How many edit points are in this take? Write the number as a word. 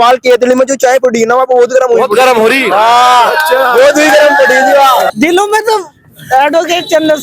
one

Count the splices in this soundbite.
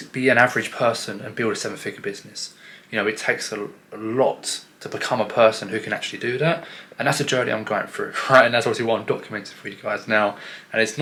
zero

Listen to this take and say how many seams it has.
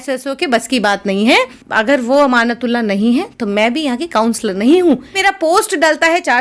two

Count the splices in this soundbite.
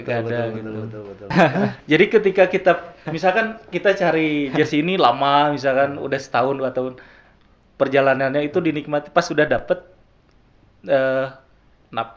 one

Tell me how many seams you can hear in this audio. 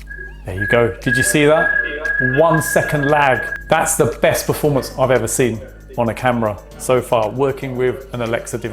one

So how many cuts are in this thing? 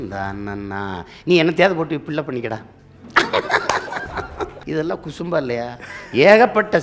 one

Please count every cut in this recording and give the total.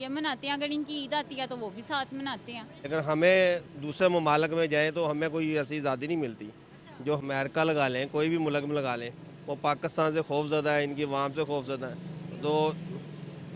two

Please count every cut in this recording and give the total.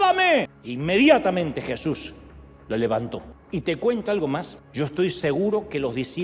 zero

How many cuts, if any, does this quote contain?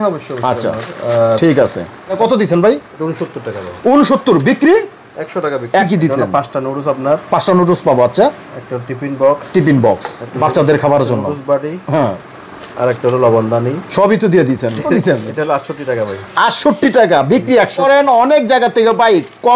four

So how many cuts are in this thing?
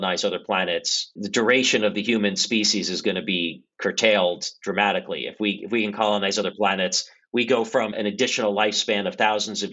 one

